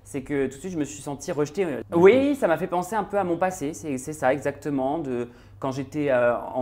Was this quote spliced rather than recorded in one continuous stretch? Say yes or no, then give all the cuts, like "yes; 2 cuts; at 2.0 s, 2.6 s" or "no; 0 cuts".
yes; 1 cut; at 1.8 s